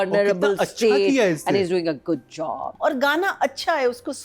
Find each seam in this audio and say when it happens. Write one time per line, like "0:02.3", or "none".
0:02.7